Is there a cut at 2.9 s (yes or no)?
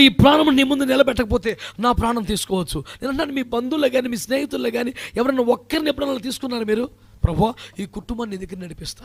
no